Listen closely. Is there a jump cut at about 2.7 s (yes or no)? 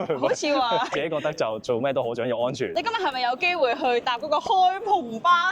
yes